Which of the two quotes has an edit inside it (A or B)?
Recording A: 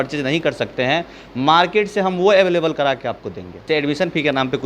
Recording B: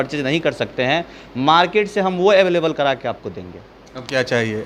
A